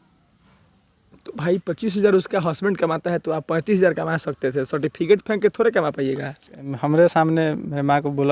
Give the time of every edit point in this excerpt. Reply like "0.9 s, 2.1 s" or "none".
6.7 s